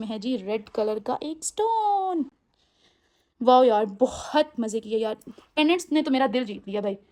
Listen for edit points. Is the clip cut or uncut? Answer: uncut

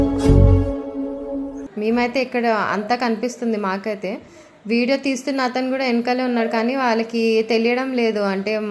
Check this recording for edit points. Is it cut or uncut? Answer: uncut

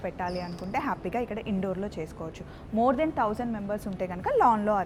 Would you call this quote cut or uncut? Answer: uncut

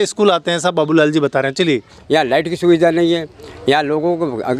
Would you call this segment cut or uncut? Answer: cut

